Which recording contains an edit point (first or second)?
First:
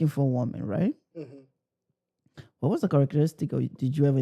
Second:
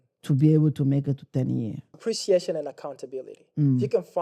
second